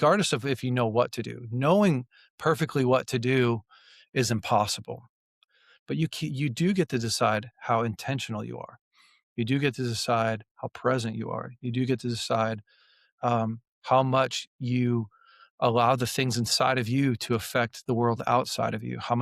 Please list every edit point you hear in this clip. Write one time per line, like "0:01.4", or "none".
0:05.2